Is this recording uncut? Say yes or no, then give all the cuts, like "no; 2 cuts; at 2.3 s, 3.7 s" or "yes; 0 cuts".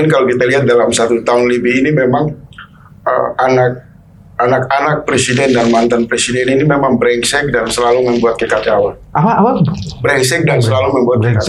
yes; 0 cuts